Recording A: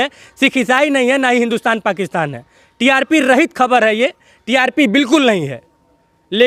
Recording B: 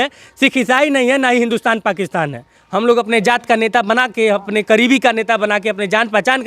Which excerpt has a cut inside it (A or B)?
B